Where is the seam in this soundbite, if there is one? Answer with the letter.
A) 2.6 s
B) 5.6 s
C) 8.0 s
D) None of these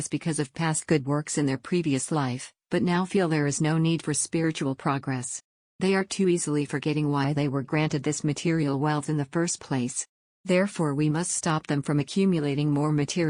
D